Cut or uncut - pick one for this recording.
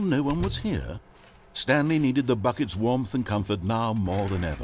uncut